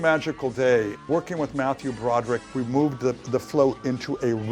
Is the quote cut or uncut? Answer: cut